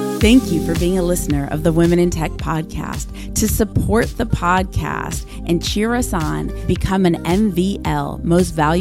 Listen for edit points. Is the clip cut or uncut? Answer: uncut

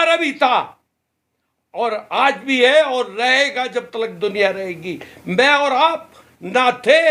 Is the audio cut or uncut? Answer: uncut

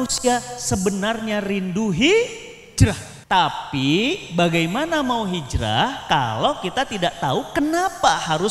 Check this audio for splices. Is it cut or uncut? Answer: cut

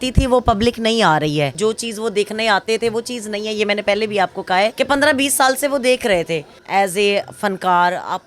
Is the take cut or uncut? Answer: cut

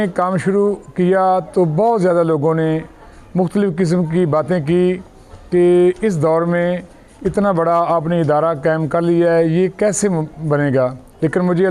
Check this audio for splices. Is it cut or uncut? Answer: uncut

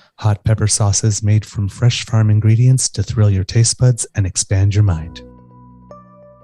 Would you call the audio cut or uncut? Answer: cut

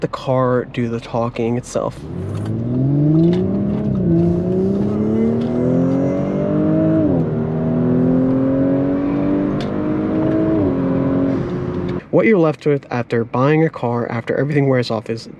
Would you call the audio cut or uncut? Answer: cut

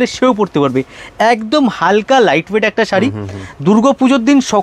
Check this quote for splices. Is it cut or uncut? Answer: uncut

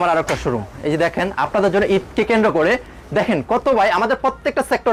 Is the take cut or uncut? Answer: uncut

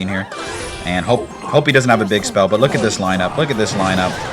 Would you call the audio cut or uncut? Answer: uncut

